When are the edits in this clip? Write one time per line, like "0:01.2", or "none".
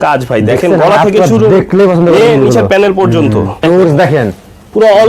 0:03.6